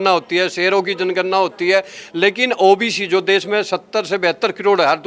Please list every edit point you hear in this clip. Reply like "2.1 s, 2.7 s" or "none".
none